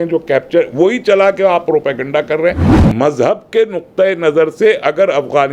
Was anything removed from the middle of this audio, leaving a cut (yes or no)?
yes